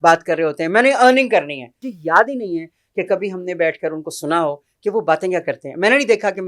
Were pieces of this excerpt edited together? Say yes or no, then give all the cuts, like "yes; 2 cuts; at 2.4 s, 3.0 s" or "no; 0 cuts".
yes; 1 cut; at 1.9 s